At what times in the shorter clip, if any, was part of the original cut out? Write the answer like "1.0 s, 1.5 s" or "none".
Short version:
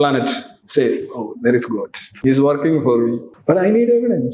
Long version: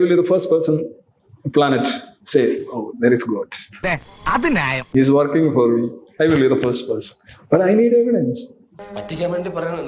2.1 s, 3.3 s